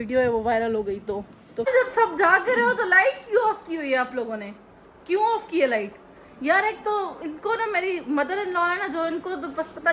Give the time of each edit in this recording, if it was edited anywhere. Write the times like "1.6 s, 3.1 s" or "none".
1.4 s